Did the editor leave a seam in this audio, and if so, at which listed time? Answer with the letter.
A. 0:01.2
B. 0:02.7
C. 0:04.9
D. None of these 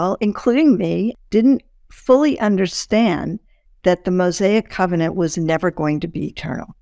A